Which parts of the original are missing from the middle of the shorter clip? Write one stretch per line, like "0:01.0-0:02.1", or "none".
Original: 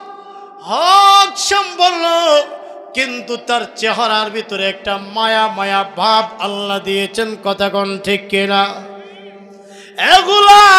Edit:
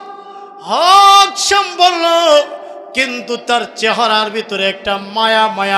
none